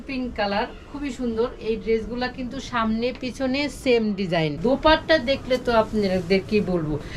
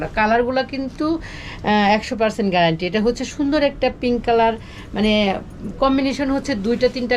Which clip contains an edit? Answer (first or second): first